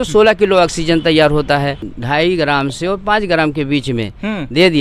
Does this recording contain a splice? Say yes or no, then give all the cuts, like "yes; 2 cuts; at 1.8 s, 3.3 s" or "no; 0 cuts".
yes; 1 cut; at 1.8 s